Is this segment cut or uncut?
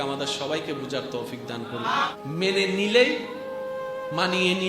cut